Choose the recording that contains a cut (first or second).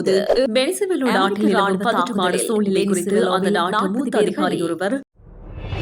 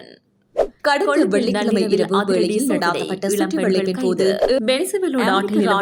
first